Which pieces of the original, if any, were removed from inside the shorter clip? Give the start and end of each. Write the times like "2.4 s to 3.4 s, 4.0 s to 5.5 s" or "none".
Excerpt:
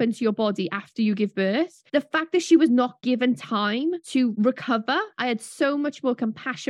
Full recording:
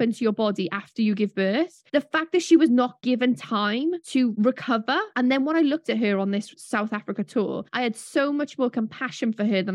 5.1 s to 7.6 s